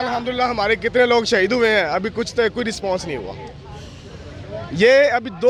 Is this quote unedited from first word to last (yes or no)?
yes